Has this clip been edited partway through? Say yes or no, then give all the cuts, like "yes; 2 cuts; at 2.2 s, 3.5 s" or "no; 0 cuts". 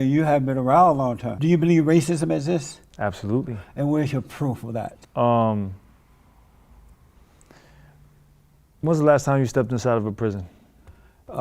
yes; 2 cuts; at 1.3 s, 5.0 s